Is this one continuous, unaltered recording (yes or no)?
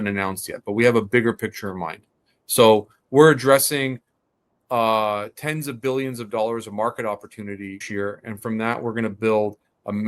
no